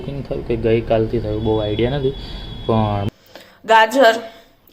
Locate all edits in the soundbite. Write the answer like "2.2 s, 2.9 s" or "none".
3.0 s

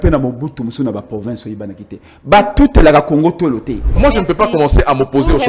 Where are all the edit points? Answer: 4.0 s

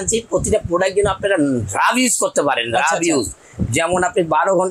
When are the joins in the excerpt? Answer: none

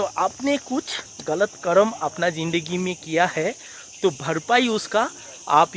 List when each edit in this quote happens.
none

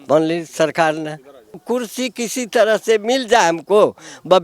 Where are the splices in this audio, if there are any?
1.6 s

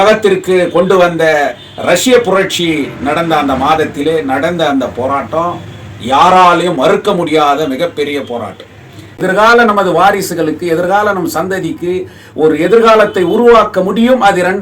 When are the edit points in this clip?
9.0 s

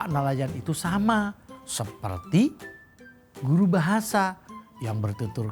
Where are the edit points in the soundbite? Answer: none

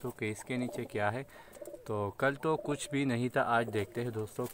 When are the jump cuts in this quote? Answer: none

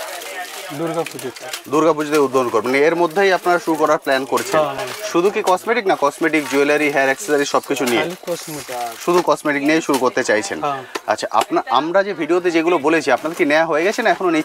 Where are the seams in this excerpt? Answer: none

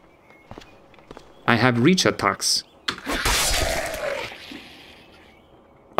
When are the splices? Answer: none

